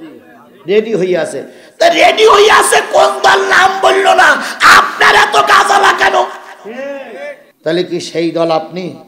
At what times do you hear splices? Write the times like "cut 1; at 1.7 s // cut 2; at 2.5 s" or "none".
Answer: cut 1; at 7.4 s